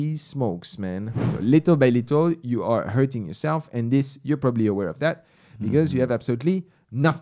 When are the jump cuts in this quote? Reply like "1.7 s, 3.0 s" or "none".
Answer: 1.2 s